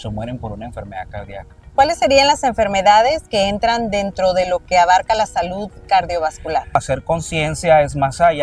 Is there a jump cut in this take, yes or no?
yes